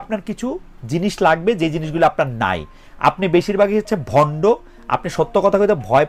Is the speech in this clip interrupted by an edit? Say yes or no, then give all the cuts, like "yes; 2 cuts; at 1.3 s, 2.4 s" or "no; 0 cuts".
no; 0 cuts